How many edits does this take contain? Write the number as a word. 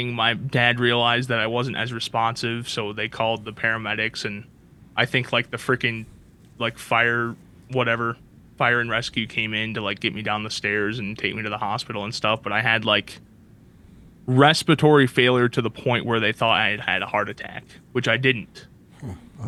zero